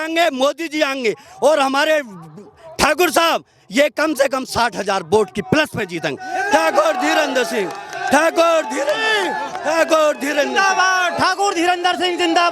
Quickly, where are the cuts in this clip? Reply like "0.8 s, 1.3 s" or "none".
none